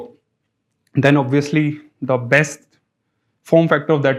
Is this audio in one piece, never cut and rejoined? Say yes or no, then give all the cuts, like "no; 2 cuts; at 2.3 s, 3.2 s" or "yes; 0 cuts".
yes; 0 cuts